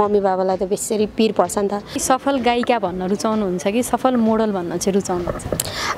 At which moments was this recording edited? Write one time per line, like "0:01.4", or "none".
0:02.0